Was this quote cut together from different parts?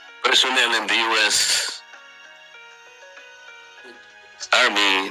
no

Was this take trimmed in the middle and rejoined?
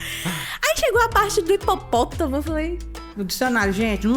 yes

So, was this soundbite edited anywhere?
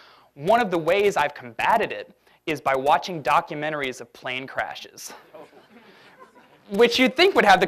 yes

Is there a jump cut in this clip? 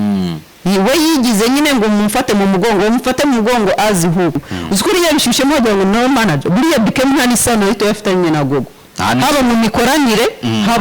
yes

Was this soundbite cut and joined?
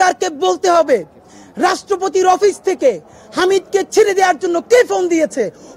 no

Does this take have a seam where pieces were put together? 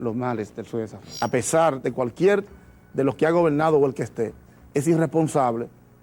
yes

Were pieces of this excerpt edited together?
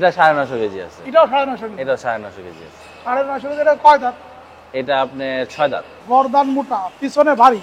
yes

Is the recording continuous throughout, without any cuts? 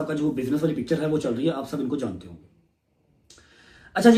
yes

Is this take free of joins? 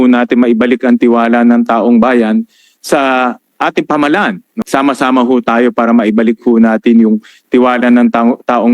no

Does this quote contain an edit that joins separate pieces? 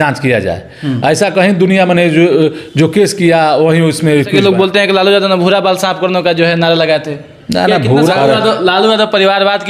yes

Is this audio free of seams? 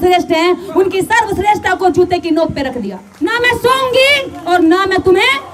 no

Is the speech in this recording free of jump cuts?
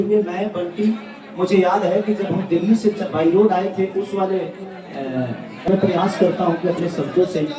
no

